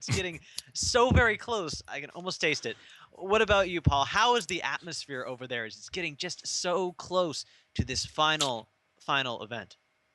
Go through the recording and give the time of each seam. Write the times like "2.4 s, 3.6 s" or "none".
4.5 s